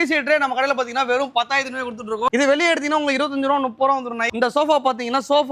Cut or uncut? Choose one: cut